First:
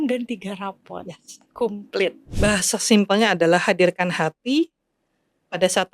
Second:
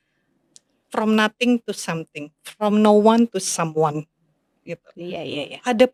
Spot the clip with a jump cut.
first; 1 cut; at 2.2 s

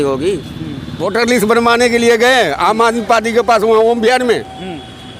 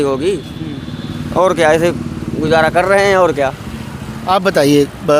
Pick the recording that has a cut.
first; 1 cut; at 1.0 s

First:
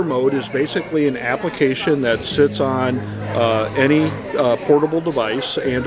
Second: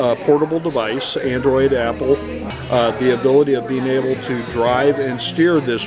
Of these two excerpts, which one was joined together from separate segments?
second; 1 cut; at 2.4 s

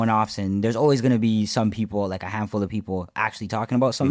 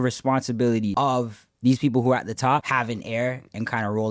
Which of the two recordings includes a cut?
second; 2 cuts; at 0.9 s, 2.7 s

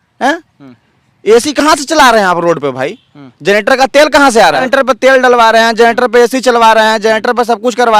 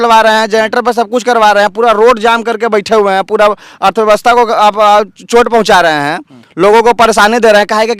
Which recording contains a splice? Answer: first; 1 cut; at 4.7 s

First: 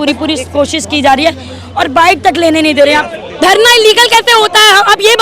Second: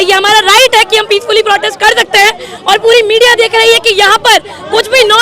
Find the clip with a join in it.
first; 1 cut; at 3.2 s

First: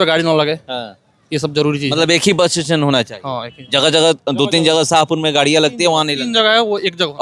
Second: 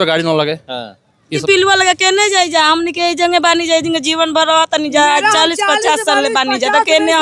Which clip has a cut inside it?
second; 1 cut; at 1.4 s

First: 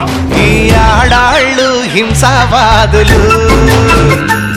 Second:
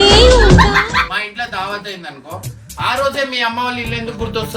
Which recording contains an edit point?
second; 1 cut; at 1.1 s

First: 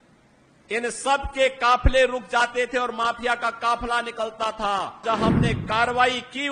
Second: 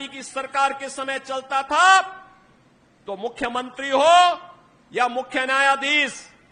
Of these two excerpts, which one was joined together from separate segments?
first; 1 cut; at 5.0 s

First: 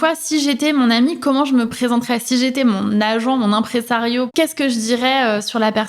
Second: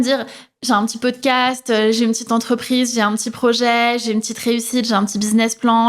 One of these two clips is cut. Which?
first; 1 cut; at 4.3 s

